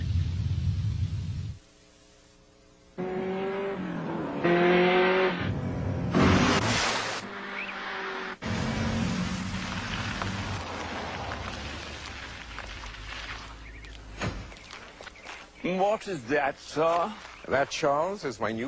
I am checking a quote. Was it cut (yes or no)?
no